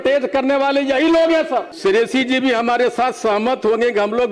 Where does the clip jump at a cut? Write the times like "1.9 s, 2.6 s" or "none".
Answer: 1.7 s